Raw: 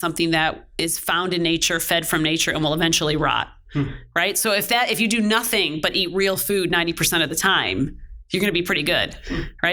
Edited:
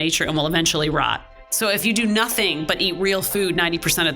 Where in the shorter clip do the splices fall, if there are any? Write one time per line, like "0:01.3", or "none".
0:01.8